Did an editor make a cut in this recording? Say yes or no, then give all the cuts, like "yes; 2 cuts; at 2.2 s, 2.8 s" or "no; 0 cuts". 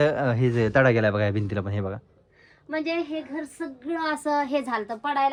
no; 0 cuts